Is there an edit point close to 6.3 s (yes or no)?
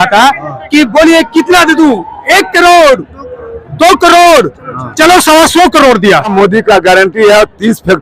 yes